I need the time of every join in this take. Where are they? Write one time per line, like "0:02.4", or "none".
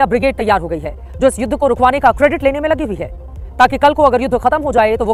none

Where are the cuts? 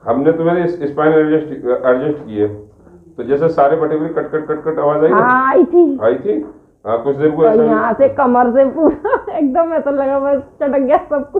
none

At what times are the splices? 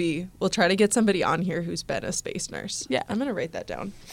none

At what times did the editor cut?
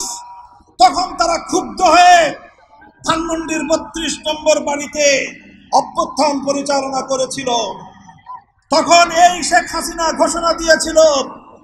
none

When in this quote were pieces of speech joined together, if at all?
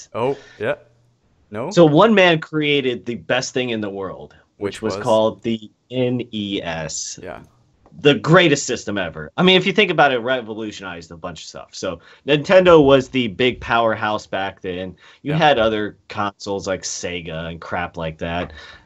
0:10.5

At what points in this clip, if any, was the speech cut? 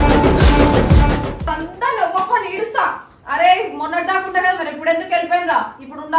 0:01.4

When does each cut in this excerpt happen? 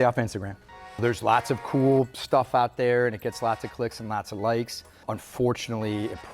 0:01.0
0:05.1

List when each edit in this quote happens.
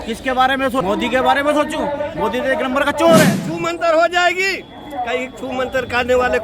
0:00.8
0:03.5

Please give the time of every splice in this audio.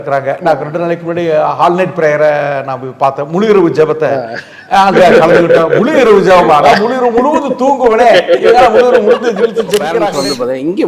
0:09.9

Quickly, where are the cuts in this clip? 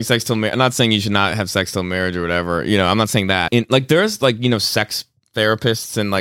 0:03.5

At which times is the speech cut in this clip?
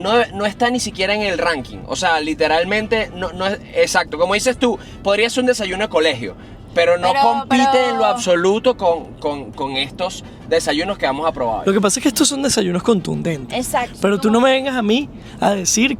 none

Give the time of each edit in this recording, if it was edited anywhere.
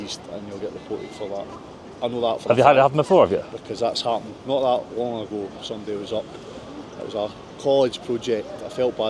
none

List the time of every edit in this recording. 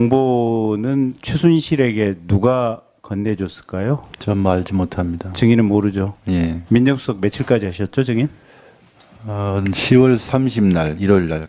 none

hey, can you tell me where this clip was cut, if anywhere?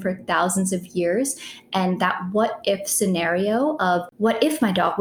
0:04.1

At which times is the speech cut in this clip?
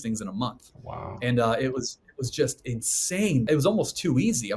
0:03.5

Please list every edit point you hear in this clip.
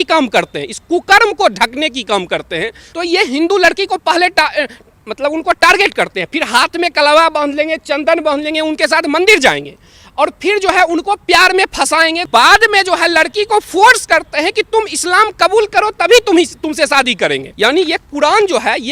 0:02.8
0:12.2
0:17.5

